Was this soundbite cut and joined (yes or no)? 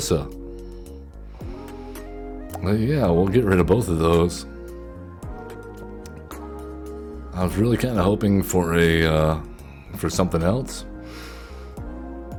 no